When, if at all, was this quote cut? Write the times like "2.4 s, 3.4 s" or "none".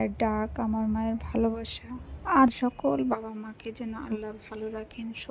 2.5 s